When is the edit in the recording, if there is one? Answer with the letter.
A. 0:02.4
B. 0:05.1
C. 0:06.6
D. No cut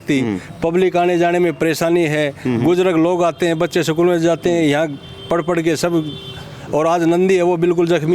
D